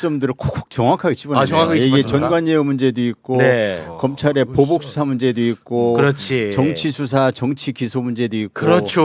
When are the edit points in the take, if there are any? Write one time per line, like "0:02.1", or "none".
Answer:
none